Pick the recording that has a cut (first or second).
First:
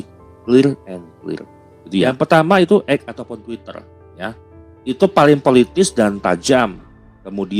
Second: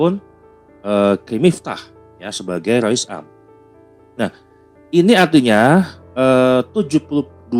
first